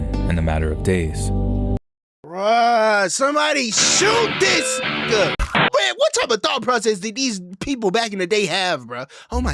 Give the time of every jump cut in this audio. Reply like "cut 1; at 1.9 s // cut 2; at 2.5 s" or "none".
cut 1; at 5.6 s